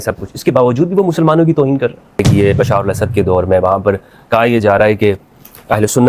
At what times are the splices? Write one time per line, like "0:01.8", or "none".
0:02.3